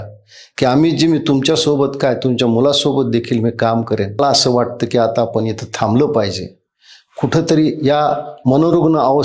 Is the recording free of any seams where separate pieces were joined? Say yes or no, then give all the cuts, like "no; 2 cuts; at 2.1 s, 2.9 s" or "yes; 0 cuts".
no; 1 cut; at 4.2 s